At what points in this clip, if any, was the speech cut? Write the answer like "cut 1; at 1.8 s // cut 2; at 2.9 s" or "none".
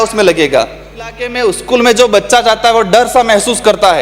cut 1; at 1.3 s